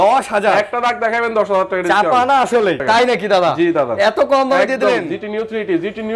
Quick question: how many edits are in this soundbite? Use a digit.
1